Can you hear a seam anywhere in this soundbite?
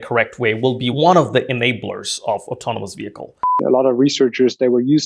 yes; 2 cuts; at 0.9 s, 3.6 s

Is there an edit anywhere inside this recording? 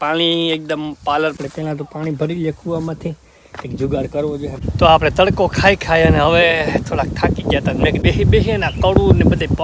yes; 3 cuts; at 1.4 s, 4.6 s, 8.0 s

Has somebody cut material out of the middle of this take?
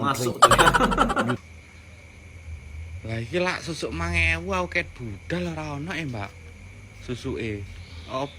yes; 1 cut; at 1.4 s

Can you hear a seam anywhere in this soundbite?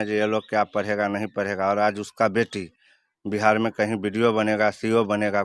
no; 0 cuts

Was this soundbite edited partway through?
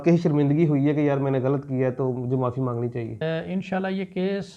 yes; 1 cut; at 3.2 s

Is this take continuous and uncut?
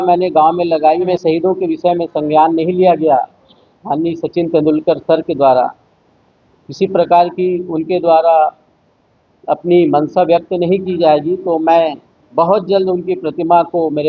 no; 1 cut; at 1.1 s

